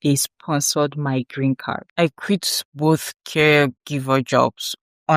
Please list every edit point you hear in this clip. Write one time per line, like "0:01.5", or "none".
0:01.8